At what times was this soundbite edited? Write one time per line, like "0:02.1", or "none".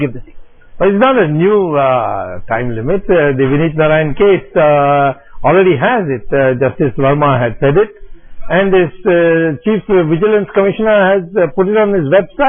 0:07.2